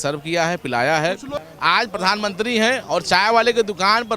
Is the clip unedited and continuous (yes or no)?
no